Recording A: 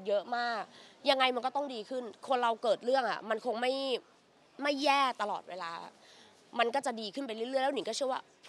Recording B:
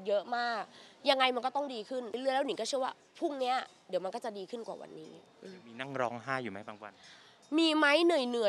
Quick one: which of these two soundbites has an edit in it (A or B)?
B